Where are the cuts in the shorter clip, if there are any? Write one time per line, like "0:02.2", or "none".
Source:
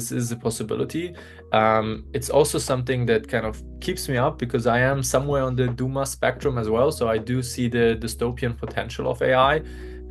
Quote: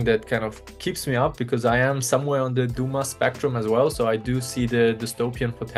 none